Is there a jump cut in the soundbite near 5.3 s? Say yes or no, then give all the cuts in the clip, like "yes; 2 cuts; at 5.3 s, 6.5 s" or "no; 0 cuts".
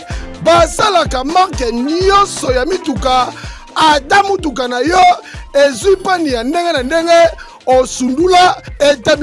no; 0 cuts